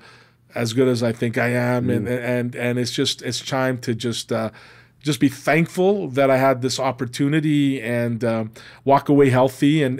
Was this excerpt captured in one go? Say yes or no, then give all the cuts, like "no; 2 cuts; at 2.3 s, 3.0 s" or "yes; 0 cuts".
yes; 0 cuts